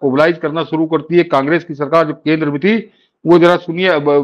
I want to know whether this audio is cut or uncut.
uncut